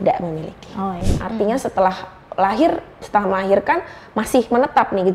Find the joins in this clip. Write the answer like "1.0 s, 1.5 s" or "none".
1.1 s